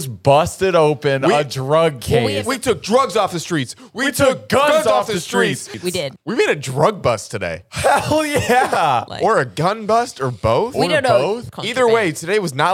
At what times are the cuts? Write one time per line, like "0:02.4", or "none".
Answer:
0:02.4
0:05.9
0:09.1
0:11.4